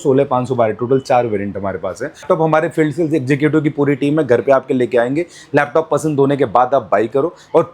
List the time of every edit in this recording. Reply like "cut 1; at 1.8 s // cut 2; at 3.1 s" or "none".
cut 1; at 2.2 s